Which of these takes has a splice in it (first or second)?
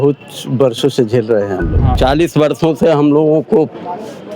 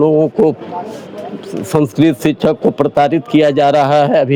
first